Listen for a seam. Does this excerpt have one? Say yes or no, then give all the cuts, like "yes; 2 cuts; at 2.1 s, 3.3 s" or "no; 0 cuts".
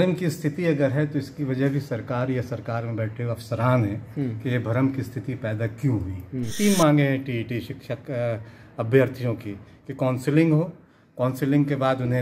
yes; 1 cut; at 6.5 s